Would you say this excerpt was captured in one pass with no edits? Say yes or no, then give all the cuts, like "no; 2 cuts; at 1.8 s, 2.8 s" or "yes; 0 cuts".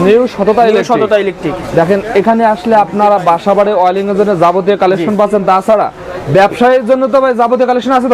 yes; 0 cuts